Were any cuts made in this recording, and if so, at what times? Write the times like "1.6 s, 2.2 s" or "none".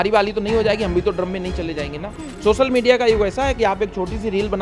2.2 s